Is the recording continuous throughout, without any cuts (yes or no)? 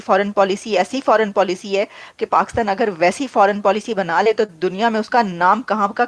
yes